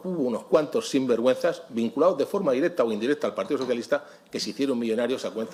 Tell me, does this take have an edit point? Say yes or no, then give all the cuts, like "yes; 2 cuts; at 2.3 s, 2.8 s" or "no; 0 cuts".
no; 0 cuts